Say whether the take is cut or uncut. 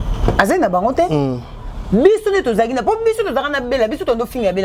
uncut